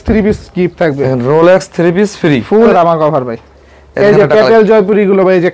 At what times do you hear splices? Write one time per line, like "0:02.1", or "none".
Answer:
0:02.7